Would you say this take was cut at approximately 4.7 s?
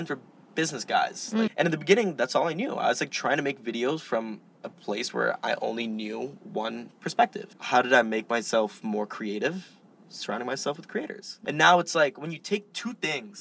no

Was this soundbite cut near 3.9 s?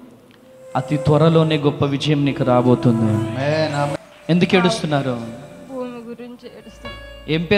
yes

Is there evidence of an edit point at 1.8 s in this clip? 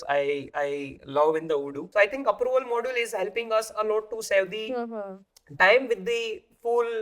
yes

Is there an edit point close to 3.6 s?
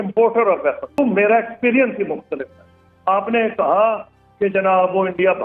no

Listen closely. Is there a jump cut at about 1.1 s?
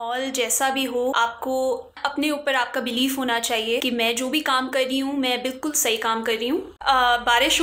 yes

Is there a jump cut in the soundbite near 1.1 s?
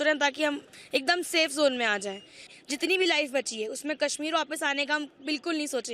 no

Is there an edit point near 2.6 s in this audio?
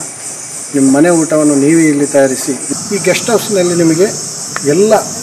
yes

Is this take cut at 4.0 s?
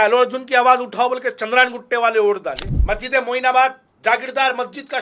no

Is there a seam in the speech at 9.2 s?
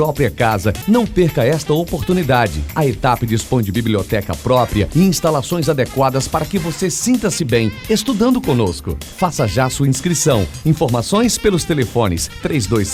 no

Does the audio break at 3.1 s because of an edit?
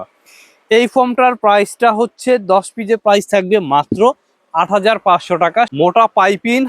no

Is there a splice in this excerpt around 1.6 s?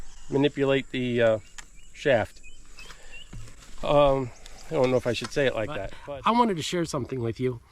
no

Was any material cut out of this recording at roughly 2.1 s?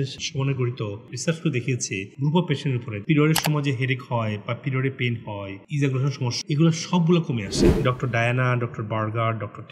yes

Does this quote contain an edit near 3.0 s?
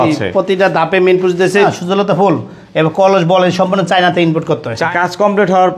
no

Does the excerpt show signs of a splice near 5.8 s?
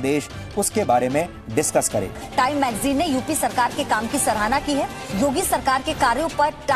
no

